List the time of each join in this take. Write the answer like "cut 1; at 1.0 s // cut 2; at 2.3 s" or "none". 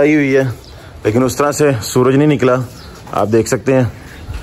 none